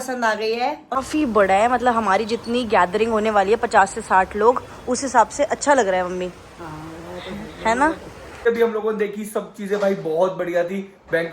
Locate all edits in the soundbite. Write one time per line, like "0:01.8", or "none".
0:01.0
0:08.4